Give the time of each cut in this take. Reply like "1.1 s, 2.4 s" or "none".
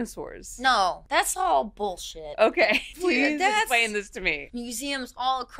1.0 s, 2.9 s, 4.4 s

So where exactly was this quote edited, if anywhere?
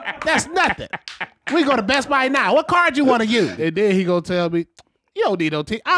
3.5 s

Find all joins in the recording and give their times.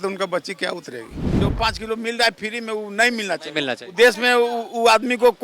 1.2 s

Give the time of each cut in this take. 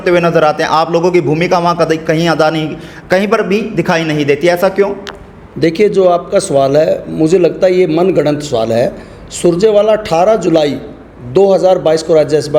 none

